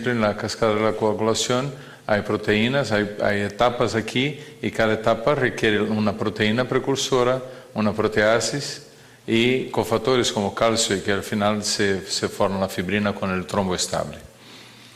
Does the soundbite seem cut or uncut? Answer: uncut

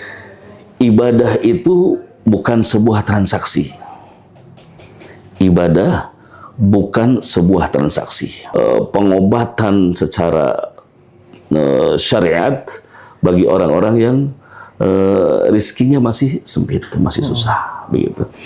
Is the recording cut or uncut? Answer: cut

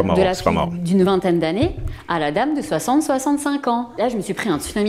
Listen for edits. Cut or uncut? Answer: cut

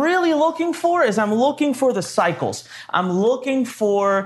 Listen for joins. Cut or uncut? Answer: uncut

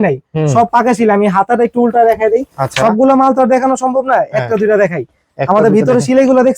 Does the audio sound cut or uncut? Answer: uncut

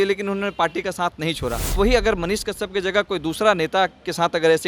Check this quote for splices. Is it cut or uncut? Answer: cut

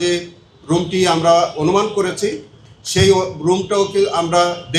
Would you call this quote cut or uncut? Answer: uncut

